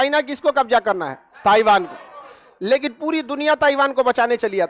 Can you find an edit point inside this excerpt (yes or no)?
no